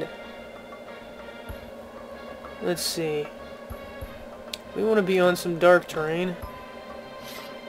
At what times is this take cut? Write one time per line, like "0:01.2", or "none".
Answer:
0:01.8